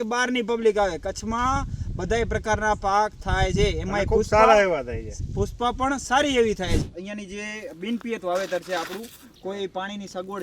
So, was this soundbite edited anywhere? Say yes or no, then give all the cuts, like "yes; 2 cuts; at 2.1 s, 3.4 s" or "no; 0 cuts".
yes; 1 cut; at 6.9 s